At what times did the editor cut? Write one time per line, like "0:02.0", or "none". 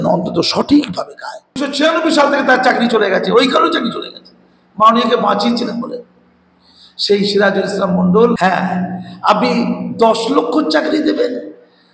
0:01.6
0:08.4